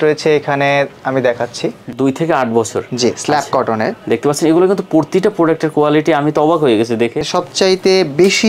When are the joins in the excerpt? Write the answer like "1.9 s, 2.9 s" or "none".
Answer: 1.8 s, 7.3 s

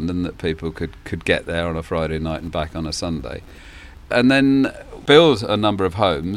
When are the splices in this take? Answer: none

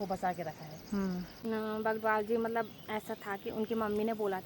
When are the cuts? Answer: 1.4 s

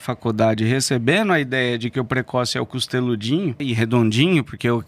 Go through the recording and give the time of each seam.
3.6 s

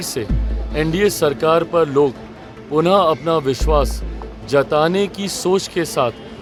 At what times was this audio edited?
none

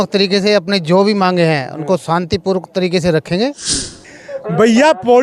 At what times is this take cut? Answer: 4.0 s

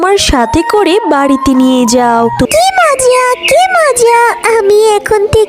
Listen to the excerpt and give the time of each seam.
2.5 s

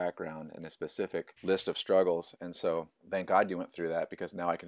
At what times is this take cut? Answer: 1.3 s, 3.0 s

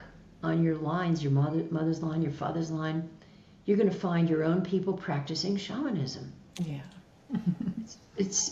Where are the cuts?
none

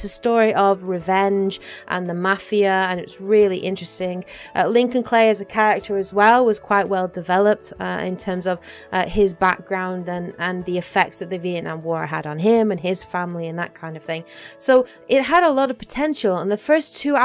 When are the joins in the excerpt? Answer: 3.8 s

